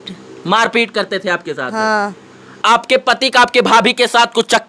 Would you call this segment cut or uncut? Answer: cut